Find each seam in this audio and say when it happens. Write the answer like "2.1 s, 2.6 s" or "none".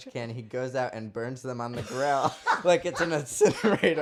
none